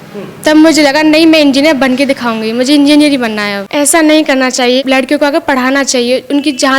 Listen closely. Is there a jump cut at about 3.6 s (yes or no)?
yes